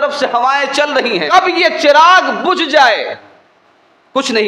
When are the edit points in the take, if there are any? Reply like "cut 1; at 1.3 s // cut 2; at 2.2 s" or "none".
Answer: cut 1; at 1.3 s